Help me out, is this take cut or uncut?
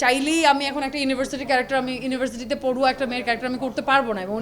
uncut